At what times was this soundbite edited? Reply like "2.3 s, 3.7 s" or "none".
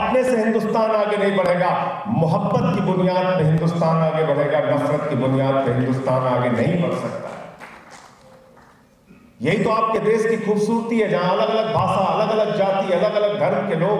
none